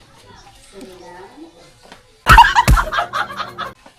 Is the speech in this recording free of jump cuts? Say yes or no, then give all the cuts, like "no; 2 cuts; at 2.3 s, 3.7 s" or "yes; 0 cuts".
yes; 0 cuts